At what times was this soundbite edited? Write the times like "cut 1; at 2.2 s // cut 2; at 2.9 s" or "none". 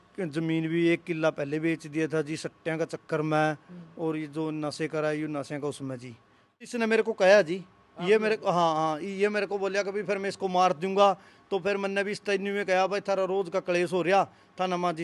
cut 1; at 6.7 s